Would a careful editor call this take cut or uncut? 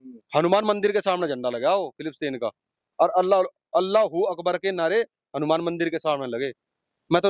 uncut